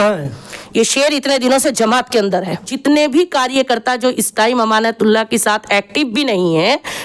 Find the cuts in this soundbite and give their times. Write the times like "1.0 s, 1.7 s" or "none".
2.7 s